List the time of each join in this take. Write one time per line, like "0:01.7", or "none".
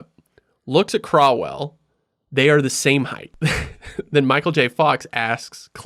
none